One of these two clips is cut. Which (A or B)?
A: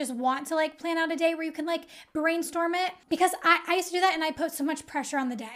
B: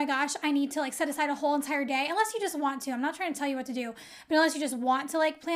A